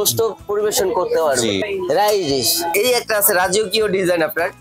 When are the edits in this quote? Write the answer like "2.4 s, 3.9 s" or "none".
1.6 s, 2.7 s